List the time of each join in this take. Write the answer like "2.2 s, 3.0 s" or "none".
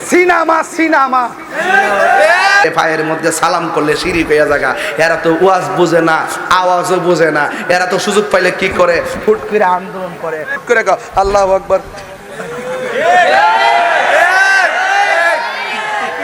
2.6 s, 10.6 s